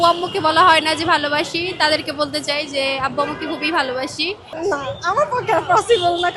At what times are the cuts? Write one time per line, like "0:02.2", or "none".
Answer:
0:04.5